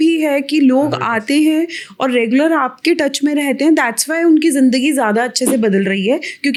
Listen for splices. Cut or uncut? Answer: uncut